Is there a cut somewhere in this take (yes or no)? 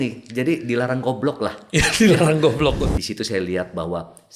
yes